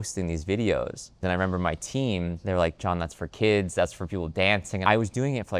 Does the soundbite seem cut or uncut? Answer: cut